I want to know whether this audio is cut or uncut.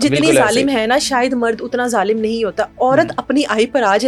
uncut